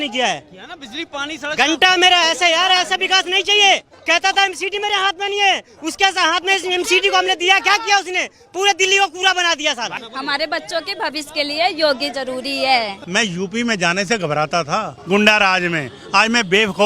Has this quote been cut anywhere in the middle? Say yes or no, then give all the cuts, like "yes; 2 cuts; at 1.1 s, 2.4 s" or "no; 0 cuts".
yes; 4 cuts; at 3.9 s, 10.0 s, 13.0 s, 14.9 s